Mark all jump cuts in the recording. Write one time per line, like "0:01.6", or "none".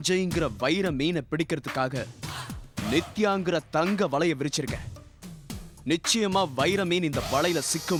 none